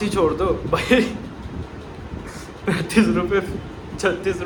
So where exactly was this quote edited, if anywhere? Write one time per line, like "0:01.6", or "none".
none